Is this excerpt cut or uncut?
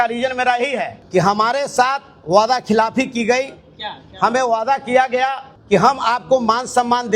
cut